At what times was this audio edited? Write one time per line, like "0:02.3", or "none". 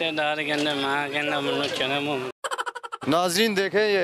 0:03.0